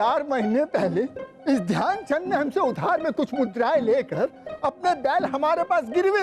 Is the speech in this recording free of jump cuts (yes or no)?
yes